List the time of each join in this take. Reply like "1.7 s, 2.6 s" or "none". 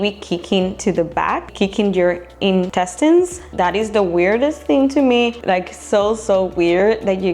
1.5 s, 2.7 s, 3.5 s, 5.4 s